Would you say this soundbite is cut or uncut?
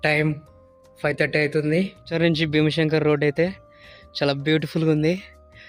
cut